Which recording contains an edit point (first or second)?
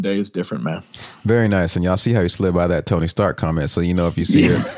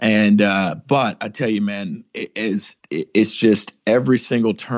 second